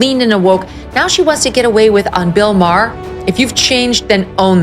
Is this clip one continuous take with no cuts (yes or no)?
no